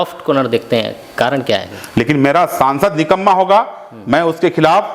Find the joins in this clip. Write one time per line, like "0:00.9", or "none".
0:01.8